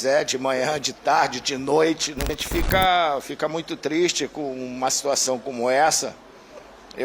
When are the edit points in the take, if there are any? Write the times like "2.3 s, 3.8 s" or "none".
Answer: 2.3 s